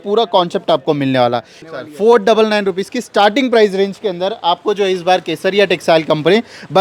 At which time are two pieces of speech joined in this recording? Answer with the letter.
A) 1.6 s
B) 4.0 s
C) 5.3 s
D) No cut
A